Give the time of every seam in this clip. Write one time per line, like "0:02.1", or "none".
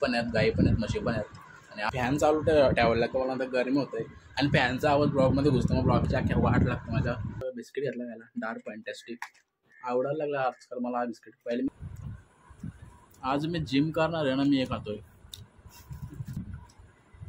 0:01.9
0:07.5
0:11.7
0:16.4